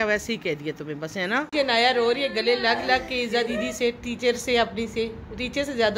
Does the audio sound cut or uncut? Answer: cut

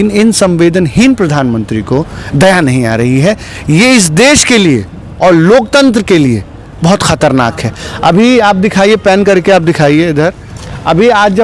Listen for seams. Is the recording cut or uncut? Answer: uncut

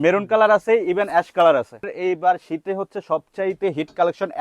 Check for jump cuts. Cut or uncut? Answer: cut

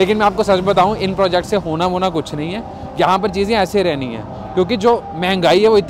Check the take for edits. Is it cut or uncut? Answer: uncut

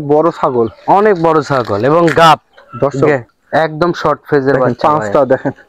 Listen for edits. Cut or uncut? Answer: cut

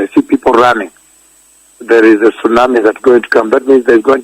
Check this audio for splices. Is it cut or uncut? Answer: cut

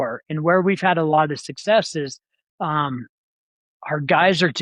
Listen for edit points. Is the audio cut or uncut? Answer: uncut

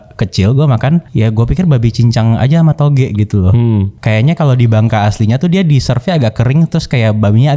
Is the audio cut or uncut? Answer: cut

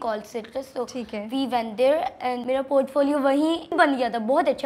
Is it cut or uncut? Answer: cut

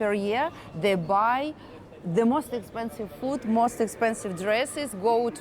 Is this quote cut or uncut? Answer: uncut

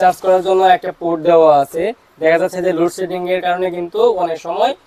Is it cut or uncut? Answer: uncut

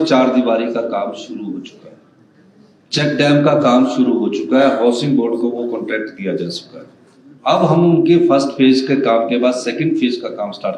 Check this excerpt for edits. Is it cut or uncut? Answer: uncut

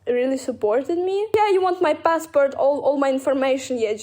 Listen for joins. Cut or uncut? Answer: cut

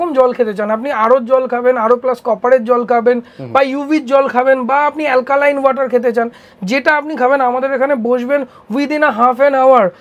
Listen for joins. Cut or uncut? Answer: uncut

